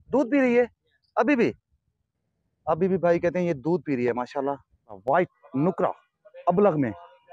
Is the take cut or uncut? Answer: cut